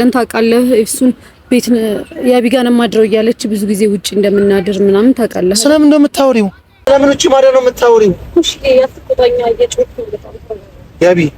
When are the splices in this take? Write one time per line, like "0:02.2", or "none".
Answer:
0:06.8